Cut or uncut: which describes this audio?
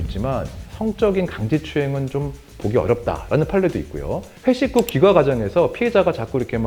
uncut